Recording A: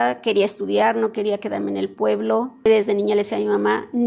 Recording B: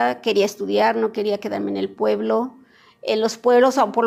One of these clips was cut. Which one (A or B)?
A